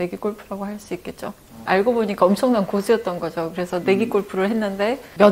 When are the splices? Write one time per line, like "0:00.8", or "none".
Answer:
0:01.5

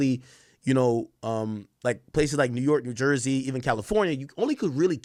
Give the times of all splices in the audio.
none

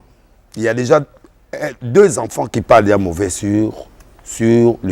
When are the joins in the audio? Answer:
0:02.5

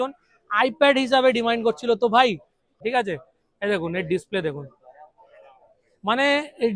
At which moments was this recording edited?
0:02.7

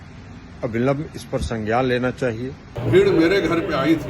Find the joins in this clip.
0:02.7

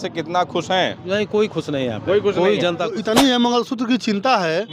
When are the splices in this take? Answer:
0:03.0

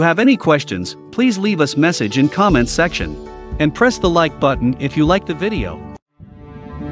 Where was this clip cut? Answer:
0:05.9

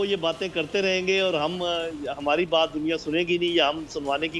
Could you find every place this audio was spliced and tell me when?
none

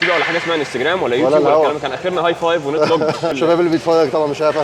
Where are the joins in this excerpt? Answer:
0:03.3

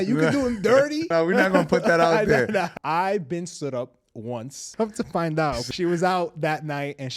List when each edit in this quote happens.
0:01.1
0:02.7
0:04.6
0:05.6

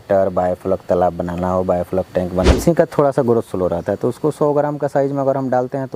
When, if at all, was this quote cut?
0:02.5

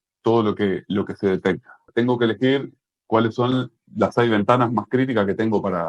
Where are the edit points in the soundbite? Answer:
0:01.8

